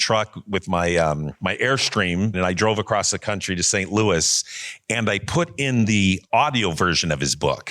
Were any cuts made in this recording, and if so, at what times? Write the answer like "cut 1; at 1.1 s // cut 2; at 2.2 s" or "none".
cut 1; at 1.3 s // cut 2; at 2.4 s // cut 3; at 6.2 s